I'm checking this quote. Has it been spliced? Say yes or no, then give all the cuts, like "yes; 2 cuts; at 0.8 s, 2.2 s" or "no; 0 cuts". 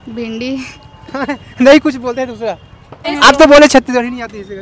yes; 1 cut; at 3.1 s